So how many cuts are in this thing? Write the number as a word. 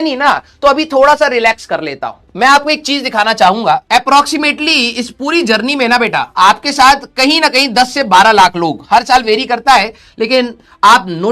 zero